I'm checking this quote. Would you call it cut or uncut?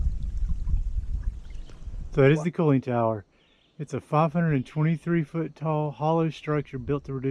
cut